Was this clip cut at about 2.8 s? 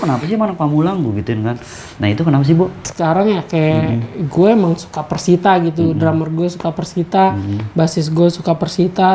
yes; 1 cut; at 2.8 s

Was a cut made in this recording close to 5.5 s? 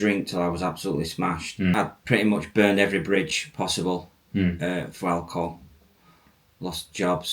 no; 1 cut; at 1.7 s

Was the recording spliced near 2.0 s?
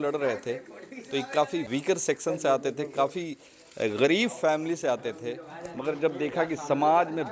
yes; 1 cut; at 2.0 s

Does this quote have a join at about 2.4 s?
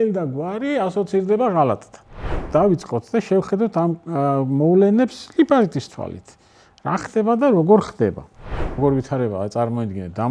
yes; 2 cuts; at 2.4 s, 8.8 s

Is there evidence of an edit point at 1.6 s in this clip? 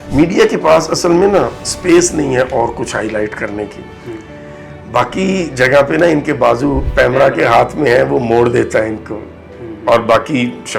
no; 1 cut; at 6.8 s

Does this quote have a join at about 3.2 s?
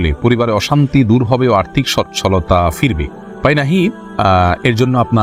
no; 0 cuts

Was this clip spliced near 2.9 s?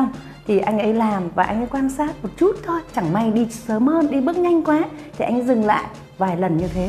yes; 2 cuts; at 2.9 s, 6.0 s

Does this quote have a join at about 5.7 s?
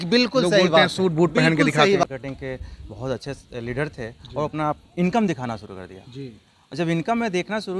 no; 1 cut; at 2.0 s

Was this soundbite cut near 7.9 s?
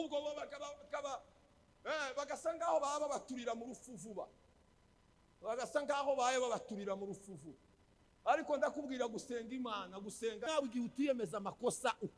no; 1 cut; at 10.5 s

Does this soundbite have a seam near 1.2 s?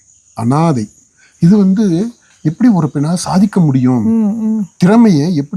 yes; 1 cut; at 1.2 s

